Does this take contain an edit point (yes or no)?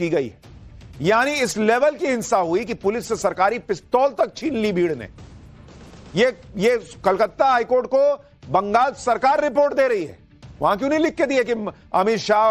no